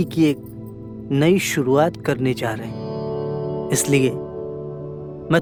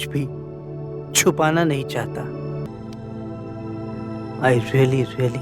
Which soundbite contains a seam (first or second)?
second